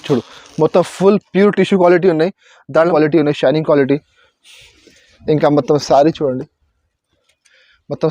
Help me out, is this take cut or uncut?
cut